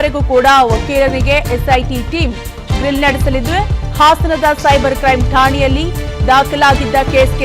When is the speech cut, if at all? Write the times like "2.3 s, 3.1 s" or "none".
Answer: 3.8 s